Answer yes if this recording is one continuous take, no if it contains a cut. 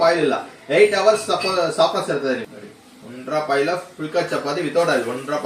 no